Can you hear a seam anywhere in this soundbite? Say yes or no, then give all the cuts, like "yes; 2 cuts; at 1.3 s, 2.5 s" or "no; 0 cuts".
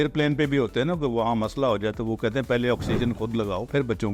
no; 0 cuts